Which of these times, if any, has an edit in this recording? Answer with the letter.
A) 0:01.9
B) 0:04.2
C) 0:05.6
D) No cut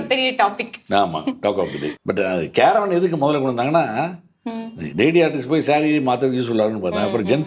A